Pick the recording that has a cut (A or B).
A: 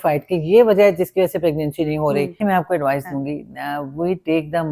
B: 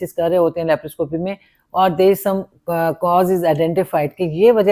A